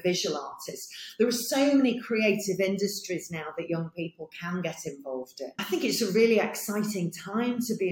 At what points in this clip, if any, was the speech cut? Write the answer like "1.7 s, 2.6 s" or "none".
5.6 s